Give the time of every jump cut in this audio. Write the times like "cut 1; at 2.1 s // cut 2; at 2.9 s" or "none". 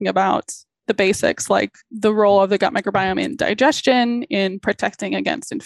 cut 1; at 0.8 s // cut 2; at 1.8 s